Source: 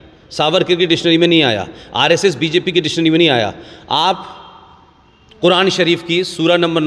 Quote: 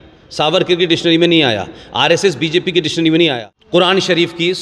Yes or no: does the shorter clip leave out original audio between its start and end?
yes